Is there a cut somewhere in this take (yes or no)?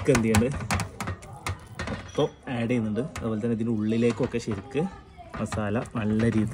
no